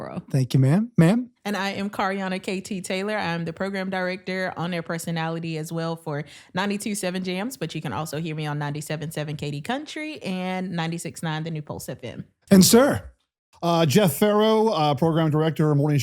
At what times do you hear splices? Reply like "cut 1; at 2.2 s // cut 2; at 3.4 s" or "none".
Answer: cut 1; at 12.4 s